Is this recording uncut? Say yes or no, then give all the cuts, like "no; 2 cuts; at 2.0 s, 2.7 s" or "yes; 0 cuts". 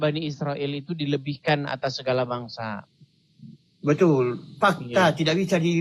yes; 0 cuts